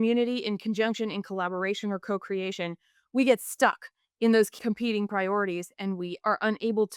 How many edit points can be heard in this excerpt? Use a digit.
1